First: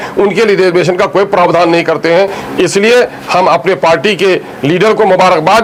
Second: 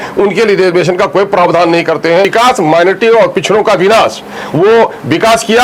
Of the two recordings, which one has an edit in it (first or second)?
second